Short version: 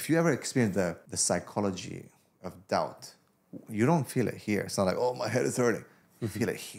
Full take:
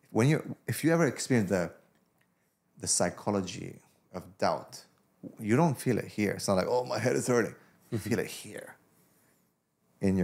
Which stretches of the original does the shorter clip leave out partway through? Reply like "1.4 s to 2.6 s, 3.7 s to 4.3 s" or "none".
1.8 s to 2.8 s